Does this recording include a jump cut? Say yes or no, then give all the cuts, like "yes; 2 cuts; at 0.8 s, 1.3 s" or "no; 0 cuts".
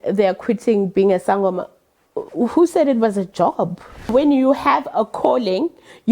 yes; 1 cut; at 4.1 s